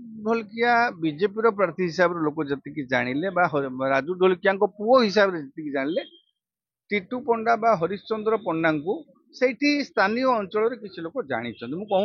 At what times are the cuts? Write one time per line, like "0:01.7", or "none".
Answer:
none